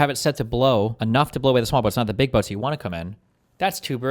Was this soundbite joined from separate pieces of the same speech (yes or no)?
yes